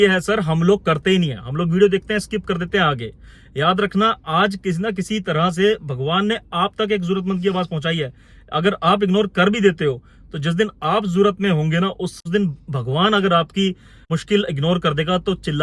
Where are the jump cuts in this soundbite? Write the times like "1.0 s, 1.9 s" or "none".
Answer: 12.2 s, 14.1 s